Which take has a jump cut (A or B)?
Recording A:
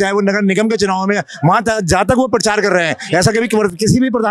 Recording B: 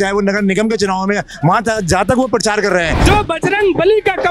B